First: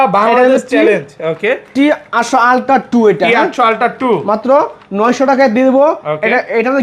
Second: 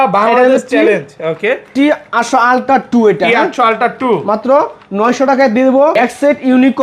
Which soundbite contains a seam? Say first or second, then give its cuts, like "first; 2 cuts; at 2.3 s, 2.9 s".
second; 1 cut; at 5.9 s